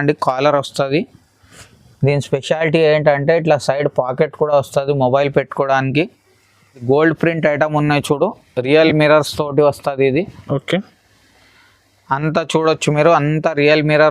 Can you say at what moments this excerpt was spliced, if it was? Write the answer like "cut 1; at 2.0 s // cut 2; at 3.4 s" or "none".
cut 1; at 6.8 s